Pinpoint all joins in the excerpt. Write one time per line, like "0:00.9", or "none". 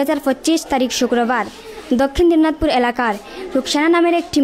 none